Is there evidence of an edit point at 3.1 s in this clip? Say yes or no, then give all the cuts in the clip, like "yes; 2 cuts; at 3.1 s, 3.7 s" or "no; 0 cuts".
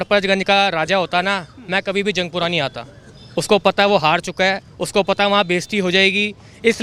no; 0 cuts